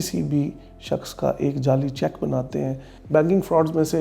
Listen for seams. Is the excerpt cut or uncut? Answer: cut